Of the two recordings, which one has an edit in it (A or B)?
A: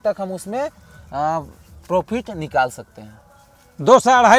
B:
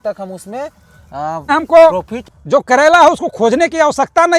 B